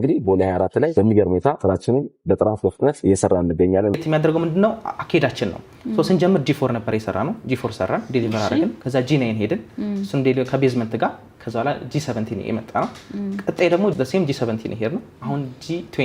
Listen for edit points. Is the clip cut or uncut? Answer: cut